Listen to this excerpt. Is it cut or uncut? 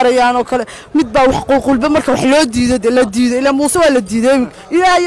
uncut